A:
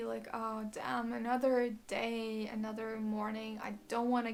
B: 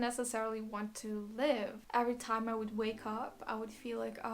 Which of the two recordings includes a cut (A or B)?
B